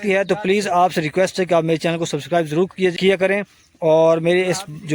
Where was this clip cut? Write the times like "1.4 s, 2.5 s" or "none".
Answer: 3.0 s